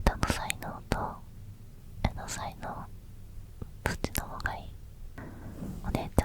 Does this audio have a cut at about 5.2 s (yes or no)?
yes